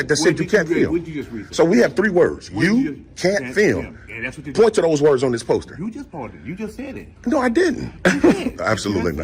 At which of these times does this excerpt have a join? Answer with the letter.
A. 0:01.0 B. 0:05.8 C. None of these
C